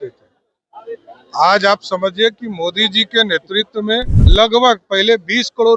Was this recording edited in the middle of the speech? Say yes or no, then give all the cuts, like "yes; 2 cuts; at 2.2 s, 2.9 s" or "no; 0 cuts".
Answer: yes; 1 cut; at 4.2 s